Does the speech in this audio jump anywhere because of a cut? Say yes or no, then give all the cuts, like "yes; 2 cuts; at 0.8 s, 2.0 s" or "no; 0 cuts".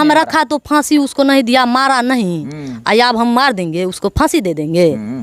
no; 0 cuts